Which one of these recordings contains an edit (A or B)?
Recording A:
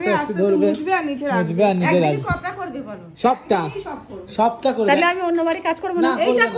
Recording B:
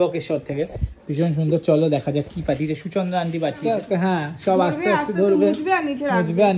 B